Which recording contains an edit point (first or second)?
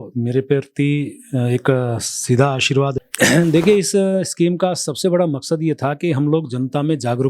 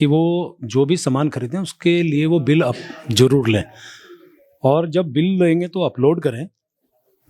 first